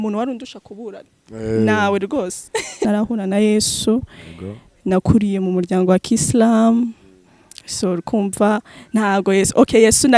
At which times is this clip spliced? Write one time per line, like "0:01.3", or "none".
0:02.9